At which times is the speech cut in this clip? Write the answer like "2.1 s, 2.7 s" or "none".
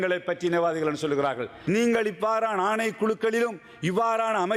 1.7 s

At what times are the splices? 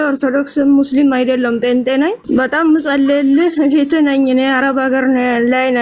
2.2 s

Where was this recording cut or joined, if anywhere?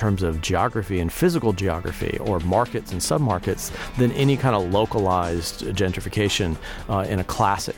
none

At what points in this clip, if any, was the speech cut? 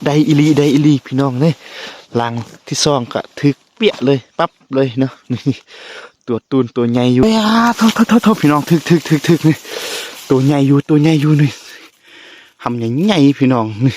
7.2 s

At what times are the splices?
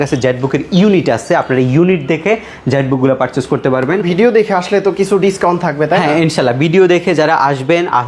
4.0 s

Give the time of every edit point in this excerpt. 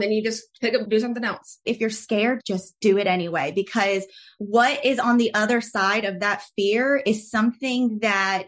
1.5 s

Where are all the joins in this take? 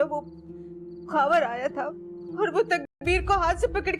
none

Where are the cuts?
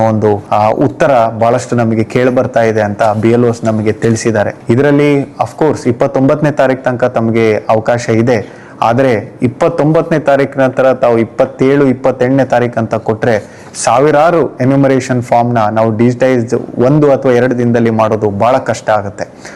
none

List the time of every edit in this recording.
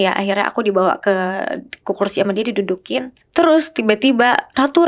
3.2 s

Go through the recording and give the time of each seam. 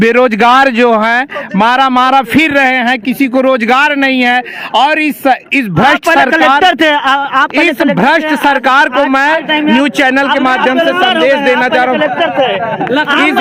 none

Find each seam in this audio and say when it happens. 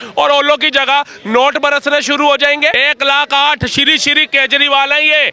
2.8 s

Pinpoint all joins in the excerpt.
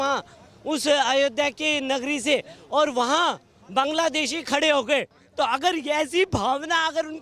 5.2 s

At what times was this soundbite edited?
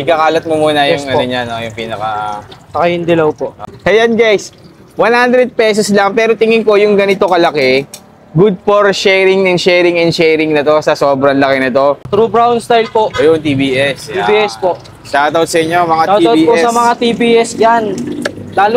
3.7 s, 12.1 s

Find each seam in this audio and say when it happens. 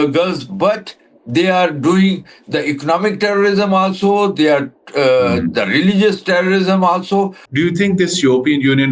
7.4 s

